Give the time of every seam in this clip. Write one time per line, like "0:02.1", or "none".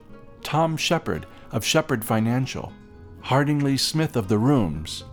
none